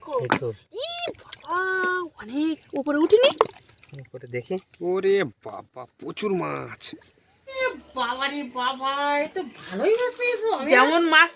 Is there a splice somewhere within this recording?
yes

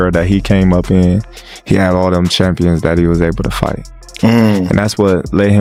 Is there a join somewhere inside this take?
no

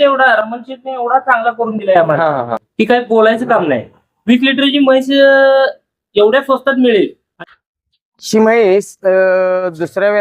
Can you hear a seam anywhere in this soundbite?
yes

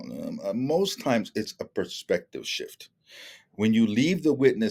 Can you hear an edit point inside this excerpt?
no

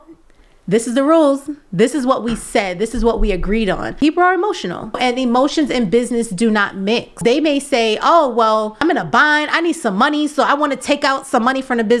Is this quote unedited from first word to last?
no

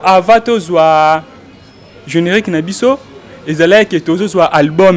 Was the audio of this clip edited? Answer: no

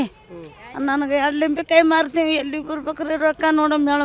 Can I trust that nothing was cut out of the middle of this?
yes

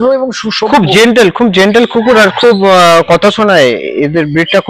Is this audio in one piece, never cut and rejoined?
yes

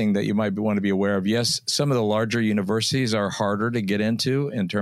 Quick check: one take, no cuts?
yes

